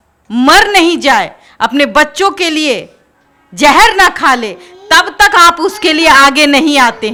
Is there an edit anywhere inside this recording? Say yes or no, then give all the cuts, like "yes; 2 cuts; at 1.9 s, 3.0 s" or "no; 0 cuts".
no; 0 cuts